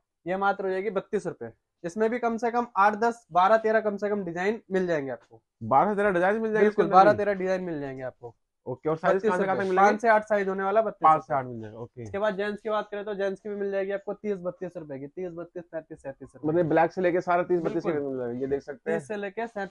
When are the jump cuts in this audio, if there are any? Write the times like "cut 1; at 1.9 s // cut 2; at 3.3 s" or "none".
none